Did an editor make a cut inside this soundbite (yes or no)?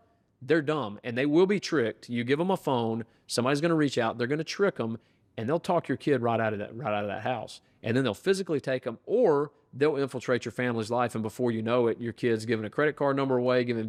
no